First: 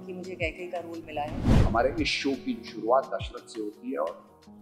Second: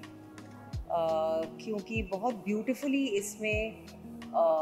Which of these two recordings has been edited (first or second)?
first